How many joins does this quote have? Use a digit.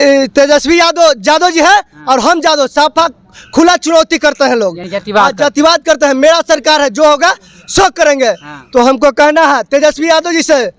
0